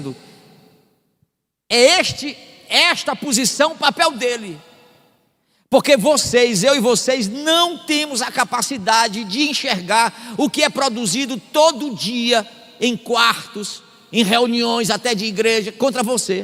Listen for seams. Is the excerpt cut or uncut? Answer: uncut